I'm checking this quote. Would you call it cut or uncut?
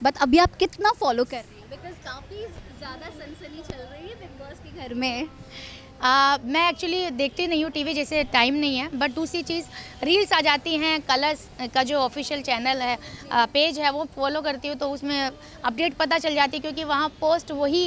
uncut